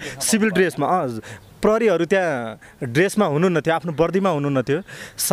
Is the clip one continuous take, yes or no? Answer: yes